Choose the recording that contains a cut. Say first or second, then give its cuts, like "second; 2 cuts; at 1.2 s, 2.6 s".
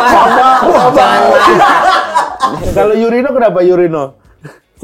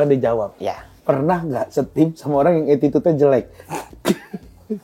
first; 1 cut; at 2.6 s